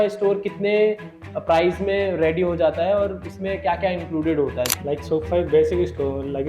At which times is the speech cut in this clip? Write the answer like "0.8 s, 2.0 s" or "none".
4.7 s